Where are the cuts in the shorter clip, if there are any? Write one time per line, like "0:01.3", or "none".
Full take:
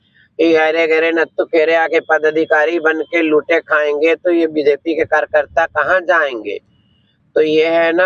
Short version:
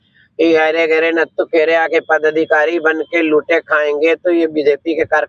none